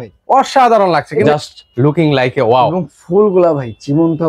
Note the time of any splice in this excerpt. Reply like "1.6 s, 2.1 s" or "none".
1.3 s